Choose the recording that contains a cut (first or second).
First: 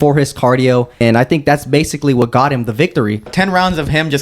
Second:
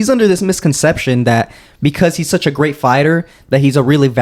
first